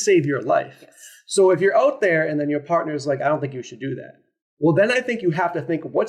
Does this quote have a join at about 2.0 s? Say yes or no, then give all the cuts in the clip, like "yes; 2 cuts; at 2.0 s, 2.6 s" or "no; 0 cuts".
no; 0 cuts